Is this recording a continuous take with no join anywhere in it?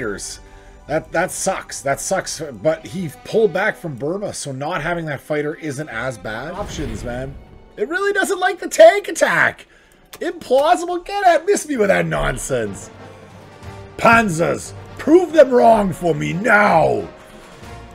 no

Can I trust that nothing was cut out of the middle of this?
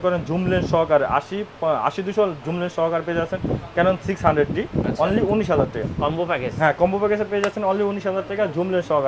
yes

